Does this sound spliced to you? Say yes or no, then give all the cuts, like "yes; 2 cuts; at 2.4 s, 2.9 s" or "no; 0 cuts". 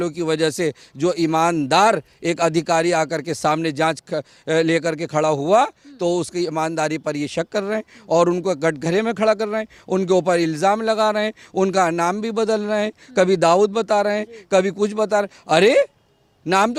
no; 0 cuts